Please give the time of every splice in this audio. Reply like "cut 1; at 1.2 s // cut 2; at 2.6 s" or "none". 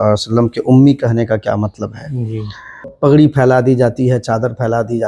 cut 1; at 2.9 s